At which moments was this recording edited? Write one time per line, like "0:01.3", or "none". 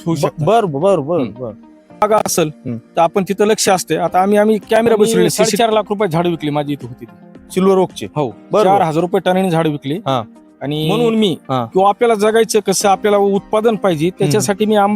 0:02.0
0:05.4
0:10.9